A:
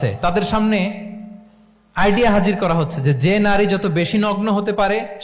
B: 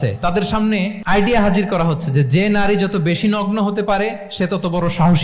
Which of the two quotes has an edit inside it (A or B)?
B